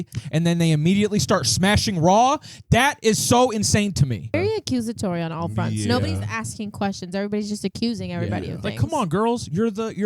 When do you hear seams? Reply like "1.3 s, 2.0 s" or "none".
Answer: 4.3 s